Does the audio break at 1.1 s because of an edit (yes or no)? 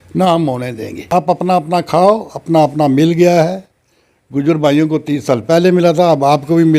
yes